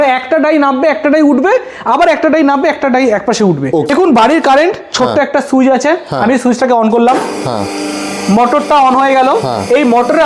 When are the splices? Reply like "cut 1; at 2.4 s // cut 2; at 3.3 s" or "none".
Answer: cut 1; at 3.9 s